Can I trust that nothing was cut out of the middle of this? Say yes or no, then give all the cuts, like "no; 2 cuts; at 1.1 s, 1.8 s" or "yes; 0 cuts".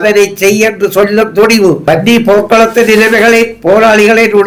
no; 1 cut; at 1.8 s